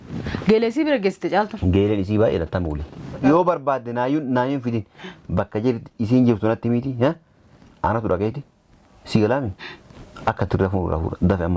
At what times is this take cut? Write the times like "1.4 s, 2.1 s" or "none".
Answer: 3.2 s